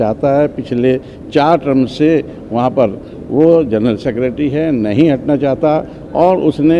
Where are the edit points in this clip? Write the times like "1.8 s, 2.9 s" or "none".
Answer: none